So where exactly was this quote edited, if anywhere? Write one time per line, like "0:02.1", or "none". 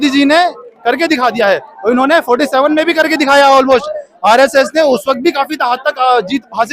none